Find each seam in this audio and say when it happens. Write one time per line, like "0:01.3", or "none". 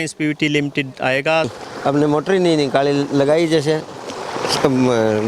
0:01.6